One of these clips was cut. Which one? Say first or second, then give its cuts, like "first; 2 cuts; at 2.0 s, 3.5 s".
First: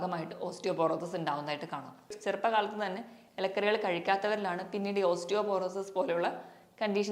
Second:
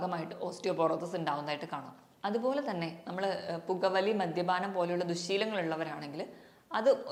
first; 1 cut; at 2.1 s